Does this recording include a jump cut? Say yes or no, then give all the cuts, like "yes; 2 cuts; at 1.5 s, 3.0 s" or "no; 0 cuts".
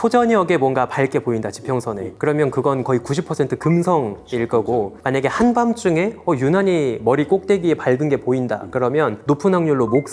no; 0 cuts